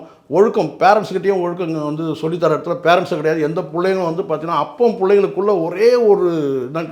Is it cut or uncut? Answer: uncut